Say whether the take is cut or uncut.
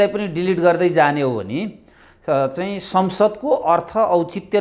uncut